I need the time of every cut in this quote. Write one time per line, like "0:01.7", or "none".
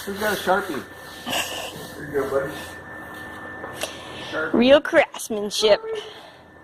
none